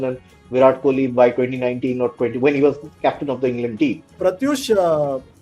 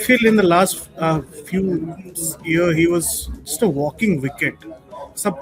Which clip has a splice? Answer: first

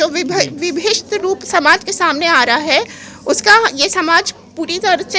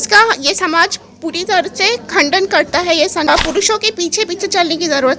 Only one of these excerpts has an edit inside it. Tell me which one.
second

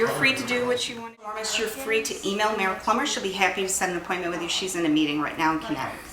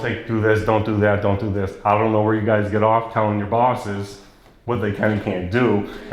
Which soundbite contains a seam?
first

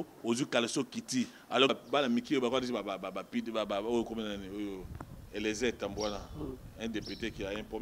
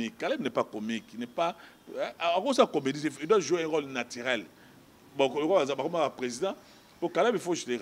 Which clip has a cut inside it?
first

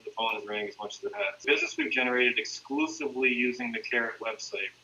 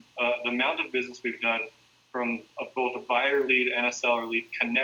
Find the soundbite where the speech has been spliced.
first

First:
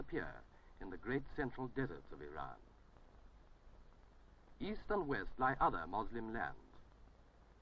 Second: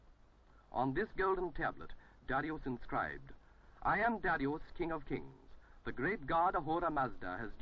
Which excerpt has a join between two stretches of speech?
second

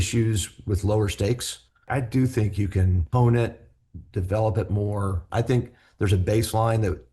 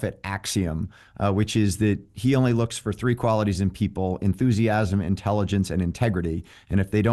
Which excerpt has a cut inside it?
first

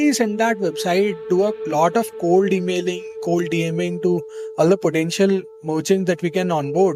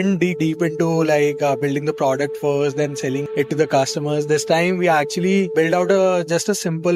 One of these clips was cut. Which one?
second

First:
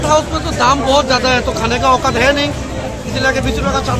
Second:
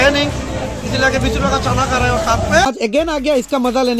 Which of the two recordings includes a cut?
second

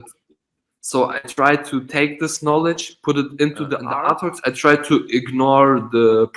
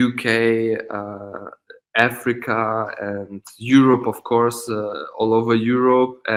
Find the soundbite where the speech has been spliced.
first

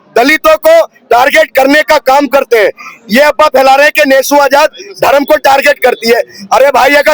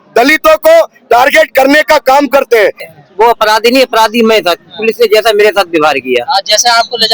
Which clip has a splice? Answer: second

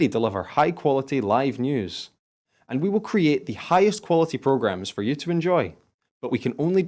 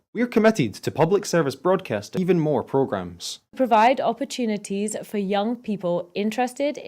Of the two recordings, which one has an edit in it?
second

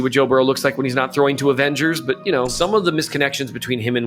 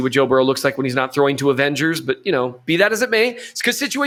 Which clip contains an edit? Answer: first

